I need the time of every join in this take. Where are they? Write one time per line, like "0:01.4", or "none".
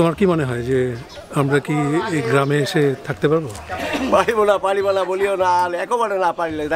0:03.6